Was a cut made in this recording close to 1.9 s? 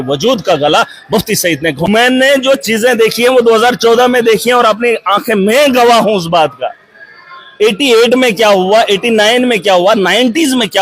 yes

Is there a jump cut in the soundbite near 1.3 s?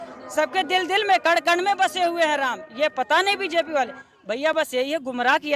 no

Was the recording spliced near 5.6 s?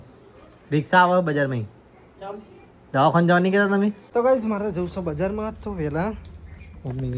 no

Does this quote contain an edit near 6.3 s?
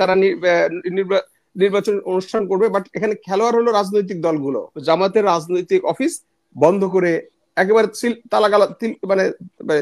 no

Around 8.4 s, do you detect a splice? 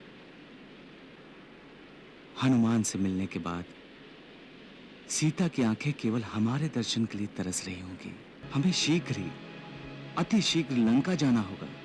yes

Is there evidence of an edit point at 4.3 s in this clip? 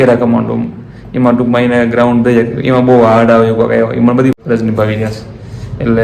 yes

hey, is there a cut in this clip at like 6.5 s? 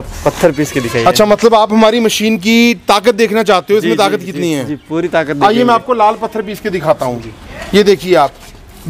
no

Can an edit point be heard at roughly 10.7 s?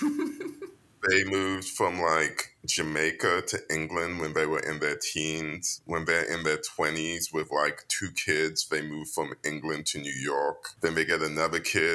yes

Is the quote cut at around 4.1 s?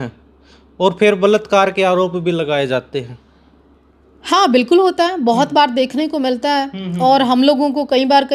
no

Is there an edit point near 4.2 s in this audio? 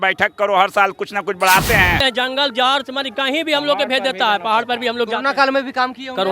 no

